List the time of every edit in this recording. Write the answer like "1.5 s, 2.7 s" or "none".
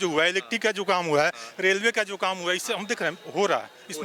none